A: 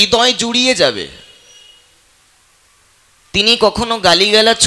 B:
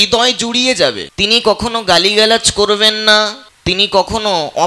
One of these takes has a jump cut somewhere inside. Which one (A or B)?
B